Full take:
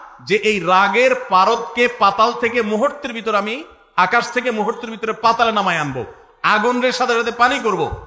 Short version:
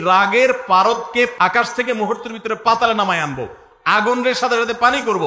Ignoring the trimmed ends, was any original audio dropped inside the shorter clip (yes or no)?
yes